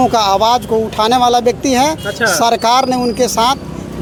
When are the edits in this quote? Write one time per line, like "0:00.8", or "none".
none